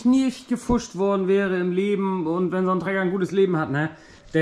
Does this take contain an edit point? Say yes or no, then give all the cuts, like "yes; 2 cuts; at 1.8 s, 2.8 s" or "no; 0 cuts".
no; 0 cuts